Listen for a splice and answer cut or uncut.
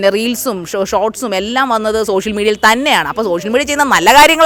uncut